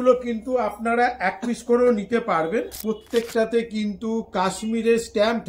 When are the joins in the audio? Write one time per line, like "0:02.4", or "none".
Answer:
0:02.7